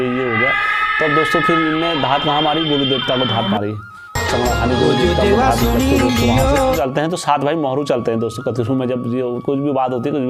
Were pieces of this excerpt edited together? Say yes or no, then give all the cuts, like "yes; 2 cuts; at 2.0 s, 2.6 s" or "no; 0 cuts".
yes; 1 cut; at 6.8 s